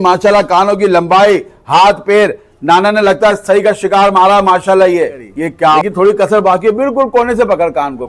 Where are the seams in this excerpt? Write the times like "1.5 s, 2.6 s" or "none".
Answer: 5.9 s